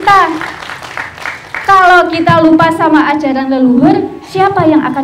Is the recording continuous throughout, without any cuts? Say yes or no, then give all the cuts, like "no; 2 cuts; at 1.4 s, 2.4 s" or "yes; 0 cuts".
yes; 0 cuts